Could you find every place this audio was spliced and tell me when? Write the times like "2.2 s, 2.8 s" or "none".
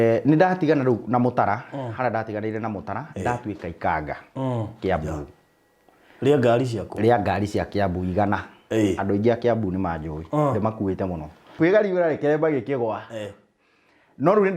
11.4 s